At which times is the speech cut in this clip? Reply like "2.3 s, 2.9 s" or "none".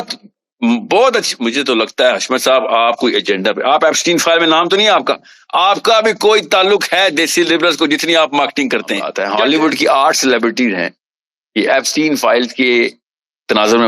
9.2 s